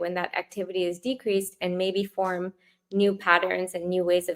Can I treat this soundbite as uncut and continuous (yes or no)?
yes